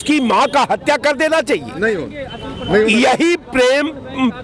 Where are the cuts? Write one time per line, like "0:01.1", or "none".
none